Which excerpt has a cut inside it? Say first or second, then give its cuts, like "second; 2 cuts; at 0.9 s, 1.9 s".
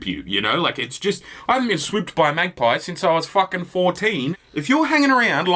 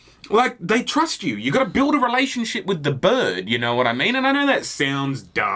first; 1 cut; at 4.3 s